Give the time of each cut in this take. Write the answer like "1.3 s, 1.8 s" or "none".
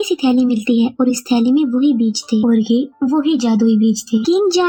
none